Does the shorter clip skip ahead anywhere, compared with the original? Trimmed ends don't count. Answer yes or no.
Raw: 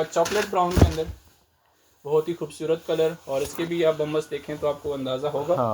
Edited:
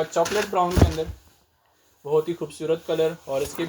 no